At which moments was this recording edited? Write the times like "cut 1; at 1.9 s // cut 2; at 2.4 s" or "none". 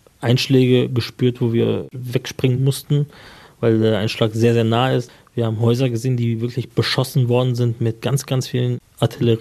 cut 1; at 1.9 s // cut 2; at 5.1 s // cut 3; at 8.5 s

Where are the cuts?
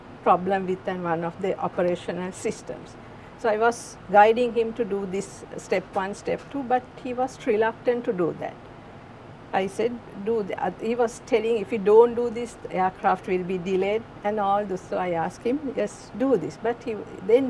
none

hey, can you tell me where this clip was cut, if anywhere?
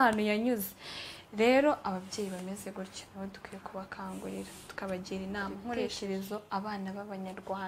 cut 1; at 5.9 s

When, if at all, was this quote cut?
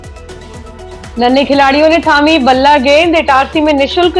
cut 1; at 1.1 s

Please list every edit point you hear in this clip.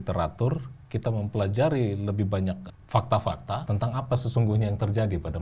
cut 1; at 2.7 s // cut 2; at 3.6 s

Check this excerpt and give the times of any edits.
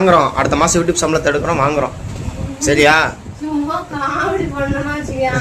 none

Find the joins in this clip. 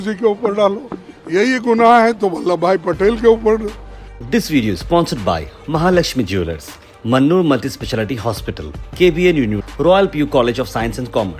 cut 1; at 4.3 s

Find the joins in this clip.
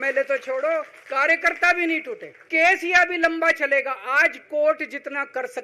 cut 1; at 1.0 s // cut 2; at 2.4 s

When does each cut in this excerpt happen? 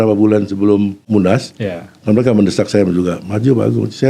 cut 1; at 1.0 s

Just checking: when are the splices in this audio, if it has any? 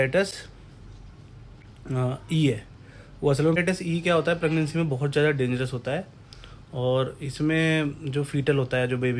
cut 1; at 3.6 s

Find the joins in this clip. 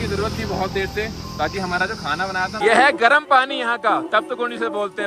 cut 1; at 2.6 s

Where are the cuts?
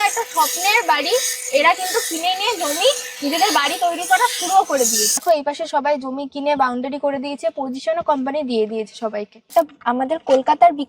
cut 1; at 5.2 s // cut 2; at 9.5 s

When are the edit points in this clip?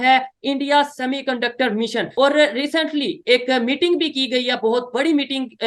cut 1; at 2.1 s

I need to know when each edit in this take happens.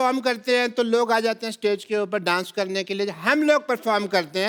none

